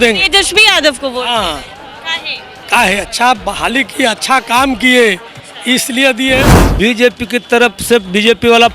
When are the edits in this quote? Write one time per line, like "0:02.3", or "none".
0:06.7